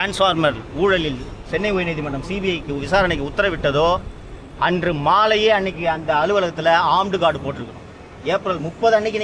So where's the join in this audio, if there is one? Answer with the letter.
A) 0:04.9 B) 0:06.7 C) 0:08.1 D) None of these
D